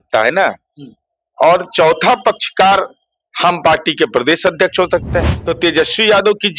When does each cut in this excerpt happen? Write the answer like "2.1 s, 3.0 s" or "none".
5.3 s